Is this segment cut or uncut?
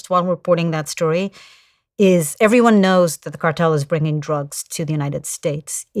uncut